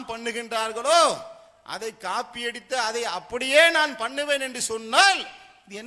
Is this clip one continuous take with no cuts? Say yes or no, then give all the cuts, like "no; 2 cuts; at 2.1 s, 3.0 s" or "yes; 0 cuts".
yes; 0 cuts